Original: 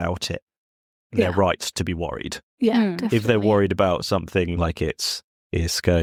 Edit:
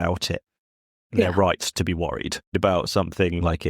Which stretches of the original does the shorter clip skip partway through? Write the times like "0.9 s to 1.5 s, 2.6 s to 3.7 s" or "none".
2.6 s to 3.7 s